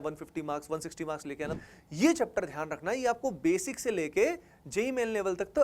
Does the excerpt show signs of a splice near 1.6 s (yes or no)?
yes